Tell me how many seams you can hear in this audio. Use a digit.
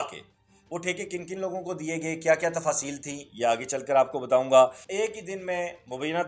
1